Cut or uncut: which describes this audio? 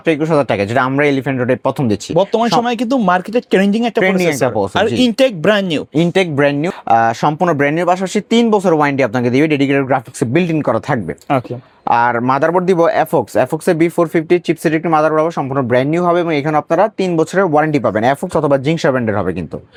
uncut